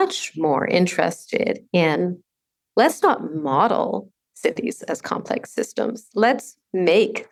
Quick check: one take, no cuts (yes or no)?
yes